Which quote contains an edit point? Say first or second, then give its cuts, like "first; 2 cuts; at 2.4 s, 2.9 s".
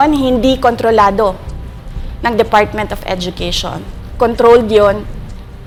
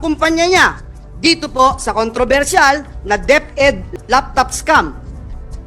second; 1 cut; at 3.9 s